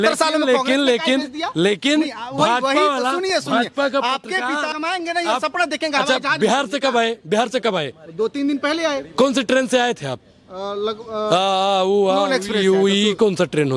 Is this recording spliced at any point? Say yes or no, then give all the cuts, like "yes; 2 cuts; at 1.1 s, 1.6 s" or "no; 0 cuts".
yes; 1 cut; at 4.7 s